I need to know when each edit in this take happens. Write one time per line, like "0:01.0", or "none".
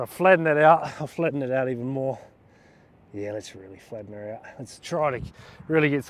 none